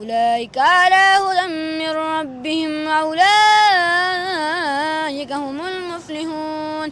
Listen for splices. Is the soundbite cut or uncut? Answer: uncut